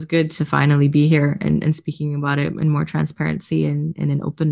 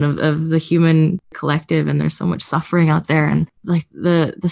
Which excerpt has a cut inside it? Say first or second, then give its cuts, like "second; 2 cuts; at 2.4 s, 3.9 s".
second; 2 cuts; at 1.3 s, 3.6 s